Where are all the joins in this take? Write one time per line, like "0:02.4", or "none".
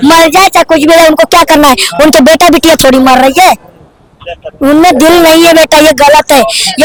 none